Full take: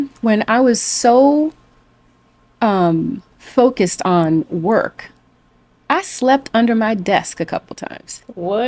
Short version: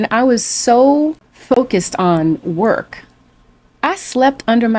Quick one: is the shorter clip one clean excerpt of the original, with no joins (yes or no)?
no